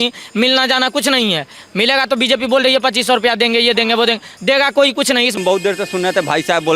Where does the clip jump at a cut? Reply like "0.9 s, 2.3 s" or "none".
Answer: 5.4 s

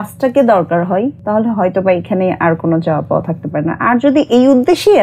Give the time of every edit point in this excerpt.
1.2 s

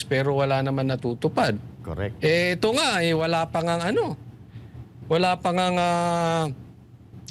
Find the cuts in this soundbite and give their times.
none

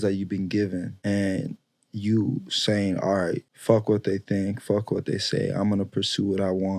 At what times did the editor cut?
0.9 s, 3.5 s

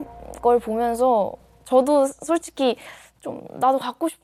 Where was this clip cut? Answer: none

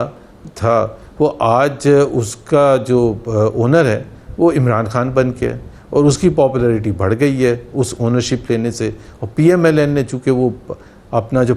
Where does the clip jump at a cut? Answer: none

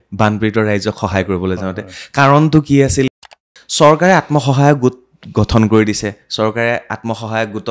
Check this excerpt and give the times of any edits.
3.2 s

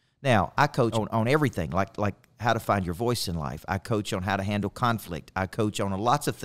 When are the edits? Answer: 0.9 s

